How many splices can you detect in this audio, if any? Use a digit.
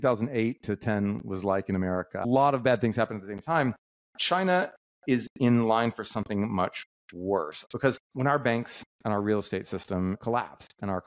4